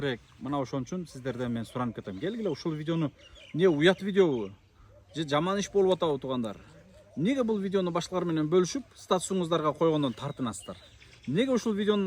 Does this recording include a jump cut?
no; 0 cuts

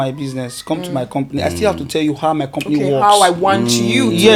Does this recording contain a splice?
no; 0 cuts

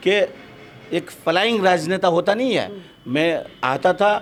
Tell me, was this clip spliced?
no; 0 cuts

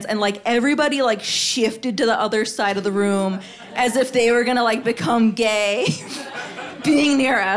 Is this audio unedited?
yes; 0 cuts

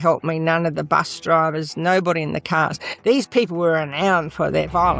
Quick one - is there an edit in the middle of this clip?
no; 0 cuts

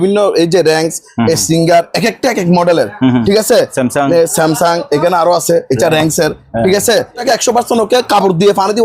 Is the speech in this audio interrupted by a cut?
yes; 1 cut; at 7.2 s

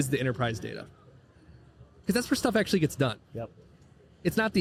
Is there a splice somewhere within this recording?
no; 0 cuts

